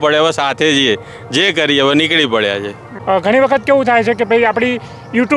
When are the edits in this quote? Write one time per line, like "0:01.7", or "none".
0:02.9